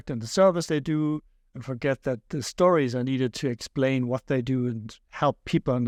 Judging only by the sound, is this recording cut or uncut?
uncut